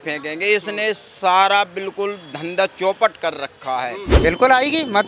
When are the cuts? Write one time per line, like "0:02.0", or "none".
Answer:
0:04.0